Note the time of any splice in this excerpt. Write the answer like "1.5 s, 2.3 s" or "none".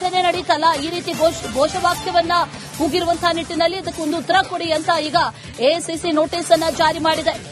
none